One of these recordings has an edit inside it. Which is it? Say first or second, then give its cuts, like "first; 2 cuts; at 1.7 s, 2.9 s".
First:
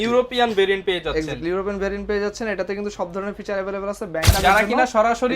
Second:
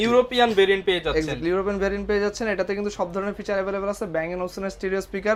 first; 1 cut; at 4.3 s